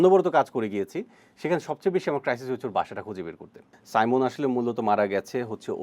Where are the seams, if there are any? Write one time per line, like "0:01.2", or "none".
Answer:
0:03.7

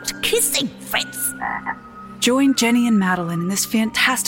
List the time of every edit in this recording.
none

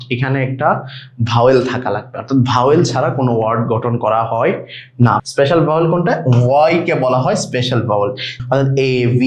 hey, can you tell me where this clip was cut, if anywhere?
0:05.2
0:08.3

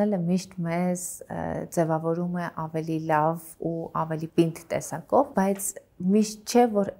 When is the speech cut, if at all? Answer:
none

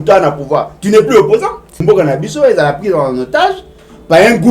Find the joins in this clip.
0:01.8

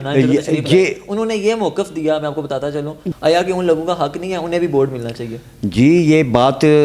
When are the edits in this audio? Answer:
0:03.0

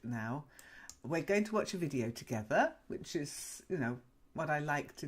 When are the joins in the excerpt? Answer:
0:01.4

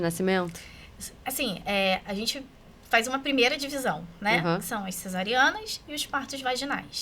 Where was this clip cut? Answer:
none

